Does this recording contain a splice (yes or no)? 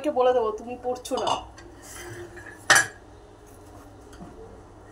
no